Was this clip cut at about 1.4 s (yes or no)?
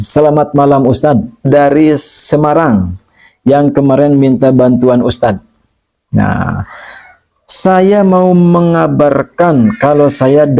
yes